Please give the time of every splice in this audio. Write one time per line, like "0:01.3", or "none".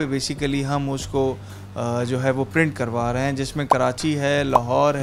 none